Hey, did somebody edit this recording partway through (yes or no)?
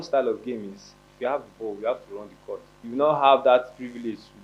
yes